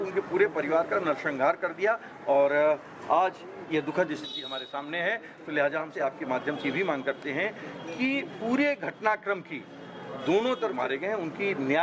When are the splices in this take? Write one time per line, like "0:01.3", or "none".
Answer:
0:05.9
0:10.8